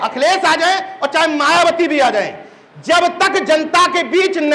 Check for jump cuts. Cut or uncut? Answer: uncut